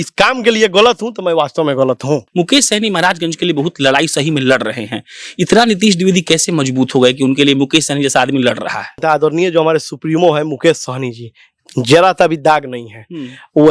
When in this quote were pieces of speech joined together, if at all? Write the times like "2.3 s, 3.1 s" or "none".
2.3 s, 9.0 s